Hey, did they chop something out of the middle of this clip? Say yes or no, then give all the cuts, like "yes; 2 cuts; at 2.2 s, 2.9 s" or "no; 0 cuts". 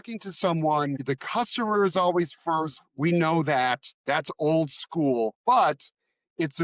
yes; 2 cuts; at 1.0 s, 5.4 s